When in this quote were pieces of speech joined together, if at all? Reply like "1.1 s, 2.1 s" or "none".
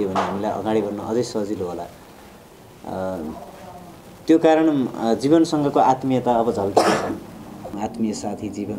7.8 s